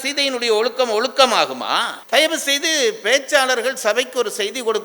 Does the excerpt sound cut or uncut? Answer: cut